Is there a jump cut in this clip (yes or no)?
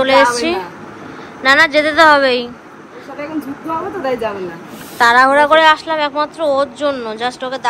no